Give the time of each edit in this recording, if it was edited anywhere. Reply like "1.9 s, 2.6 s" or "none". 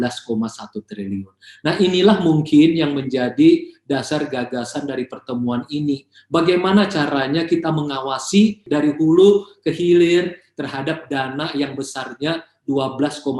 8.7 s